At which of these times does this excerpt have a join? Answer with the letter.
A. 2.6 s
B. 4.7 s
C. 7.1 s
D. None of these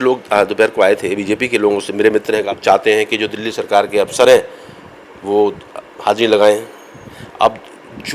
A